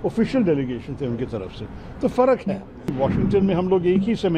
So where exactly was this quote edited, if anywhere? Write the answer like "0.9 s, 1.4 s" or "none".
2.9 s